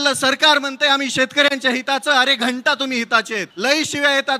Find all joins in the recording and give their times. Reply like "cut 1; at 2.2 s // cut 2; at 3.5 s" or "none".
cut 1; at 3.5 s